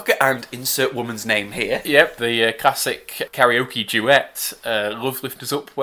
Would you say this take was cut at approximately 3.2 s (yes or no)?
yes